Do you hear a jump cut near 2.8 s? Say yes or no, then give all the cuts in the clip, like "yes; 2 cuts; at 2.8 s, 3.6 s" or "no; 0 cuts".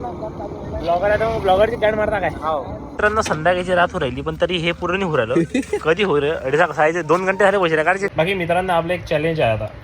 yes; 2 cuts; at 2.8 s, 8.1 s